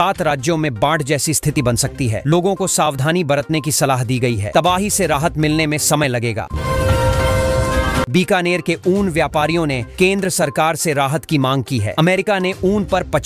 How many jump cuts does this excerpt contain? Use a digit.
2